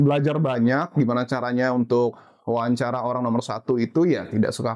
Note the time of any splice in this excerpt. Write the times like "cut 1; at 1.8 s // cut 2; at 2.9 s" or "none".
none